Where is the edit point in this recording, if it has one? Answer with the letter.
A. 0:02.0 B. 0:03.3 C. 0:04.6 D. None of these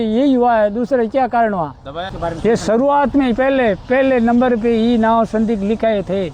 A